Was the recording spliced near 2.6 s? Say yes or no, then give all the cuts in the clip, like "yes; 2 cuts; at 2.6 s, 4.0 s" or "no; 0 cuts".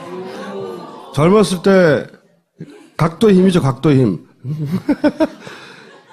yes; 1 cut; at 2.6 s